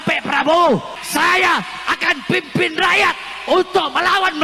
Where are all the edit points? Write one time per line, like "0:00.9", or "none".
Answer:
0:01.0